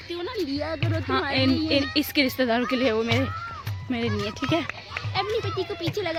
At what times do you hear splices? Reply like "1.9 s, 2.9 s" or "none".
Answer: none